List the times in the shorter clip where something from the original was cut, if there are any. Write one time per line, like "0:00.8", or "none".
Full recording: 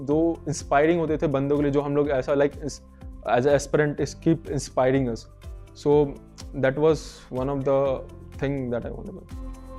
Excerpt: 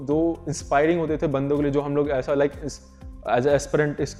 none